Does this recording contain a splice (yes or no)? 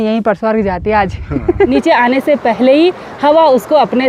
yes